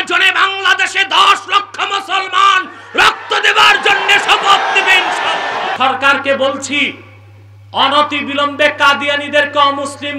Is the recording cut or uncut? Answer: cut